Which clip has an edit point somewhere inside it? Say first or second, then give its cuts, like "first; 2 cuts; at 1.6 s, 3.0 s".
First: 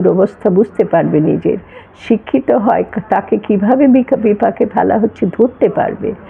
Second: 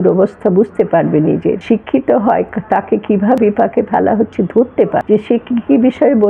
second; 3 cuts; at 1.6 s, 3.4 s, 5.0 s